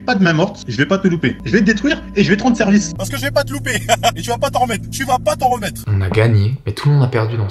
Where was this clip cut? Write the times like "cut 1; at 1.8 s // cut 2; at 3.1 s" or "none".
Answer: cut 1; at 1.4 s // cut 2; at 2.9 s // cut 3; at 5.9 s